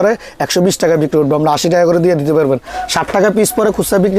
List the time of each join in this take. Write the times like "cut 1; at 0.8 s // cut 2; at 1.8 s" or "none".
cut 1; at 2.8 s